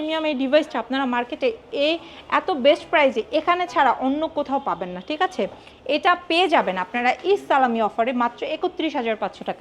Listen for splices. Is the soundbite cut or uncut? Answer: uncut